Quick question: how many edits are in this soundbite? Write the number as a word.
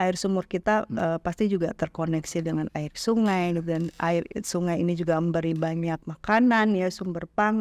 one